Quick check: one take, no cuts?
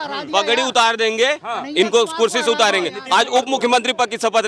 yes; 0 cuts

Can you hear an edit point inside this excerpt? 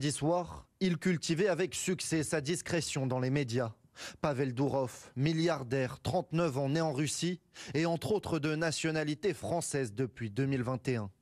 no; 0 cuts

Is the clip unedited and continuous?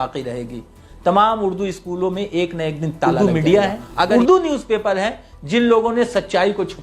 no; 1 cut; at 3.1 s

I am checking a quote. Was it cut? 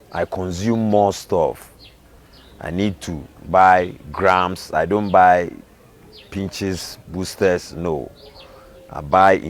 no; 0 cuts

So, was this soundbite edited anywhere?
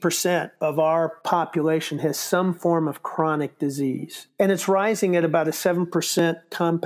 yes; 1 cut; at 4.2 s

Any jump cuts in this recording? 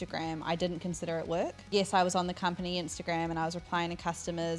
yes; 1 cut; at 1.7 s

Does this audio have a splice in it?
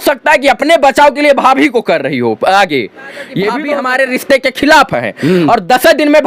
yes; 1 cut; at 3.6 s

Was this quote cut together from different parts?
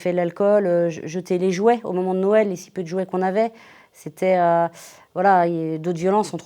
no; 0 cuts

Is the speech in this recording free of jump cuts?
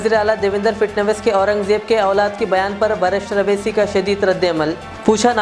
yes; 0 cuts

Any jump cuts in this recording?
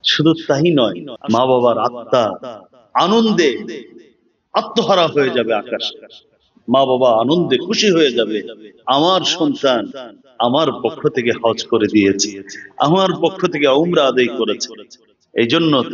yes; 1 cut; at 1.1 s

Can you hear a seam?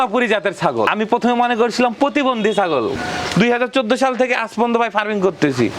yes; 2 cuts; at 0.9 s, 3.0 s

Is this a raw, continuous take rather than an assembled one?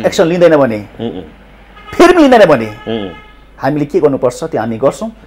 yes; 0 cuts

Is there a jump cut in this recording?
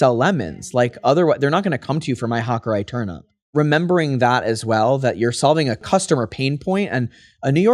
yes; 2 cuts; at 3.5 s, 5.8 s

